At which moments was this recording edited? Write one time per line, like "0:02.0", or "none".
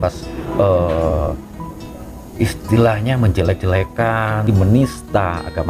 0:04.5